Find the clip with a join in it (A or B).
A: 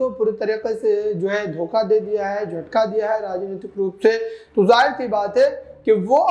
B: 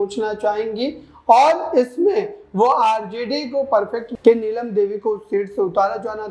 B